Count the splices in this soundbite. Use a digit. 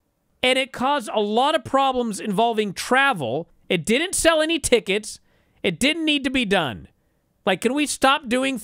1